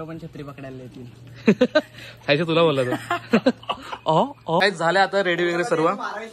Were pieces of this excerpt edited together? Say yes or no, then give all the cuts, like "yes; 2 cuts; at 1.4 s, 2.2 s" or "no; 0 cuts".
yes; 1 cut; at 4.6 s